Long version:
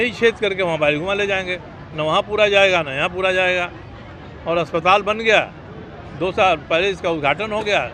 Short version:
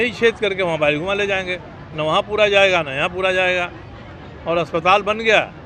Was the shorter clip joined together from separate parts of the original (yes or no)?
no